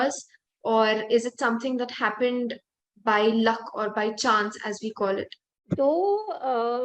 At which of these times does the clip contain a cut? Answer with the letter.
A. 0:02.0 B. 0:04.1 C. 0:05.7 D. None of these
C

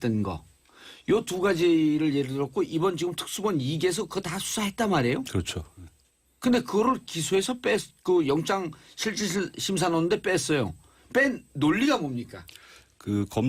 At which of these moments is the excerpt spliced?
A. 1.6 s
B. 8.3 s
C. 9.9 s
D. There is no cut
A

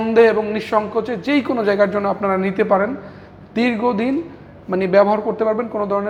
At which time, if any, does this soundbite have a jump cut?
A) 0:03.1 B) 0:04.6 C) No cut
C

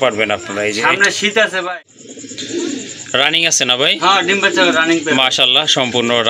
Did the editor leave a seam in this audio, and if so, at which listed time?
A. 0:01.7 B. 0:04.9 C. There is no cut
A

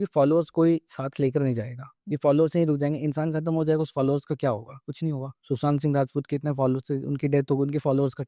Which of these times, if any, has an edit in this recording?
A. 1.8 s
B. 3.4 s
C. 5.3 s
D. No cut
C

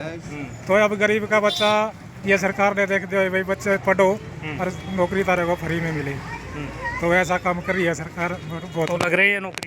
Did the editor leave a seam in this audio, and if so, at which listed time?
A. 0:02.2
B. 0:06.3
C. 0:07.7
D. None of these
D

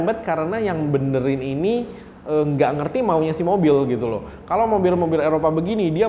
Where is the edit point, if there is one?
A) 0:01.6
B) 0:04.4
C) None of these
C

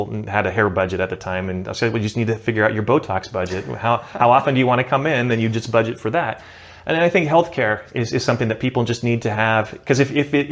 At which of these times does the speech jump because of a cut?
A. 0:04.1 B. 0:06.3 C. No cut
C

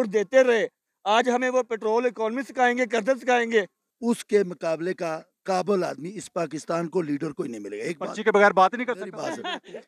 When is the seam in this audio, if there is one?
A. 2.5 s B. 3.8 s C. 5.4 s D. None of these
B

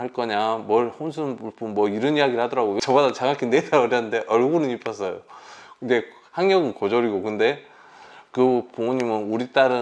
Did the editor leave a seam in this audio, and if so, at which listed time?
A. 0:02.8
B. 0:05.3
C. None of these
A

